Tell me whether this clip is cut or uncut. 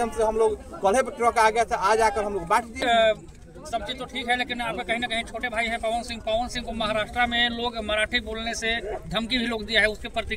cut